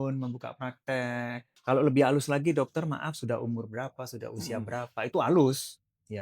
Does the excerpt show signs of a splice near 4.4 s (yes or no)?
no